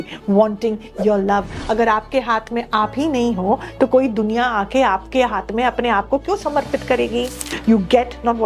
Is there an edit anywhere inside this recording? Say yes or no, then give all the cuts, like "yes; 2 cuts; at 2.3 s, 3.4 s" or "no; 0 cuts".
yes; 2 cuts; at 1.5 s, 7.5 s